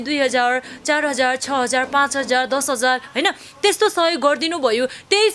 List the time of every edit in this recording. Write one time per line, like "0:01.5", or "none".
none